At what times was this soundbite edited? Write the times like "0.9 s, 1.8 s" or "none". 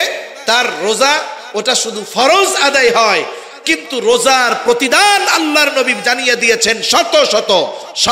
none